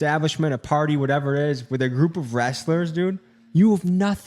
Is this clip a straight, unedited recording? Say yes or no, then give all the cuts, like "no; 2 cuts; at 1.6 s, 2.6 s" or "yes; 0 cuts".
yes; 0 cuts